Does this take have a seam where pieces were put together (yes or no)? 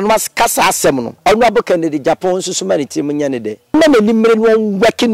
yes